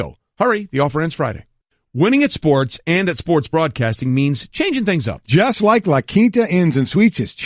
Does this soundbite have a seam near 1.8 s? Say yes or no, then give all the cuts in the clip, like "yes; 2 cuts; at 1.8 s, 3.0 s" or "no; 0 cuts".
yes; 1 cut; at 1.8 s